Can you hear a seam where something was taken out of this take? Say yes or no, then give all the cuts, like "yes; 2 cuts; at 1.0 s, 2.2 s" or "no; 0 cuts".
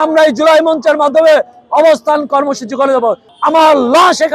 yes; 1 cut; at 3.3 s